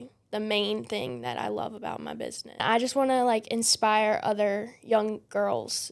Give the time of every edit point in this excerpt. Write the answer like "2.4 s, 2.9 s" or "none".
2.6 s

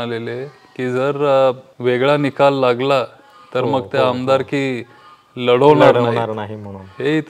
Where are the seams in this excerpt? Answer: 1.7 s

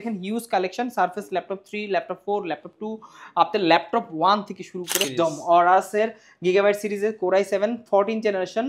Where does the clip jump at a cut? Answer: 5.0 s

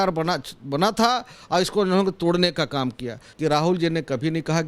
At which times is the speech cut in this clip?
3.2 s

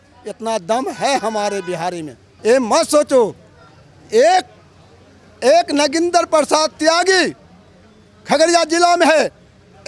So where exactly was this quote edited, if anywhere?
none

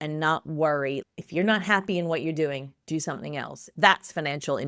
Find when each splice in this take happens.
1.0 s, 3.6 s

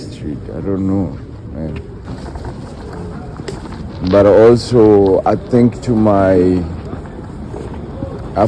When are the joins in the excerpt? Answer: 2.0 s

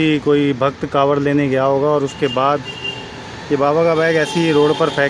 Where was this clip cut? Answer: none

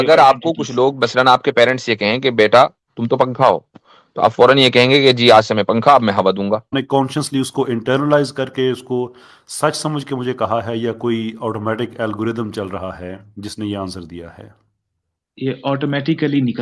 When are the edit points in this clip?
6.8 s

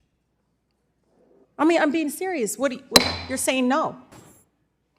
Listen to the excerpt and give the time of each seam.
4.1 s

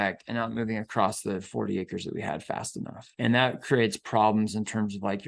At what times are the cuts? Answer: 3.0 s

